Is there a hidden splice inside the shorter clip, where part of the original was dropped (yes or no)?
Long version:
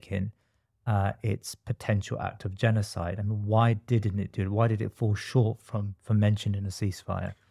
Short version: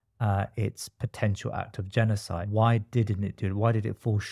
yes